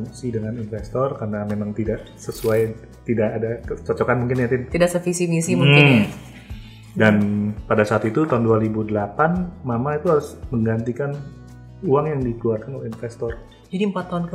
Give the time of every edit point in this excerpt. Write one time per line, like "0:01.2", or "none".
none